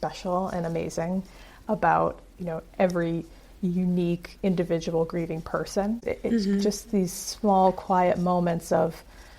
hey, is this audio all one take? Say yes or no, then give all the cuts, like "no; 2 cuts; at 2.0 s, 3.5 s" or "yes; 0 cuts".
no; 1 cut; at 6.1 s